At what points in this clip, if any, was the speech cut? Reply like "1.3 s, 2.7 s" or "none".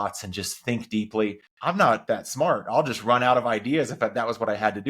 2.0 s